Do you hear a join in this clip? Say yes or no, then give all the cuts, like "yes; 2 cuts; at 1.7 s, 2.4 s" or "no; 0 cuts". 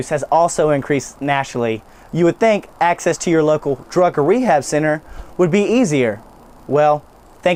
no; 0 cuts